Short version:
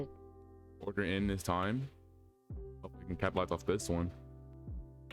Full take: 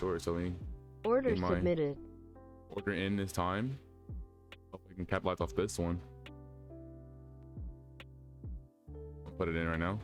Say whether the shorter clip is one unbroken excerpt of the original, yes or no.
no